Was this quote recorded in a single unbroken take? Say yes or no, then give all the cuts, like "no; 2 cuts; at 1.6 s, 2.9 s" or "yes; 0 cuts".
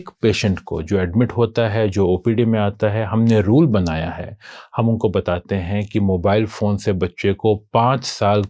yes; 0 cuts